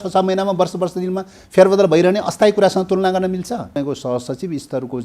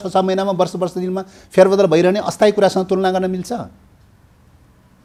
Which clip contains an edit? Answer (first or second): first